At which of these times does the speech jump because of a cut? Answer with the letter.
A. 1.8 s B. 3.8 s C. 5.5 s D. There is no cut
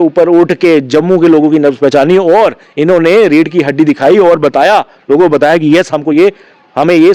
D